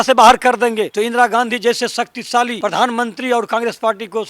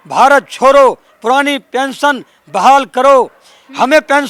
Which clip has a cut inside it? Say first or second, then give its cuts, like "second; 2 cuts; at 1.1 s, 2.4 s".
first; 2 cuts; at 0.9 s, 2.5 s